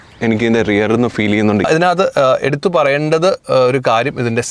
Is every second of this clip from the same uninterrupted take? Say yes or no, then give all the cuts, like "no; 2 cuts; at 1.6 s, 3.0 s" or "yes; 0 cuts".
no; 1 cut; at 1.7 s